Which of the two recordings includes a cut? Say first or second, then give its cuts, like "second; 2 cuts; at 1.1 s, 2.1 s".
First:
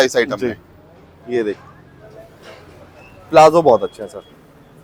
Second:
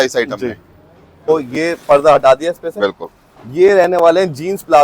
second; 1 cut; at 1.3 s